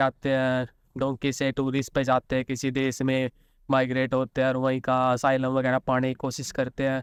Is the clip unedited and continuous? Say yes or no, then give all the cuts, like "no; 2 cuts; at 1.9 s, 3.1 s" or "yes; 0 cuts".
yes; 0 cuts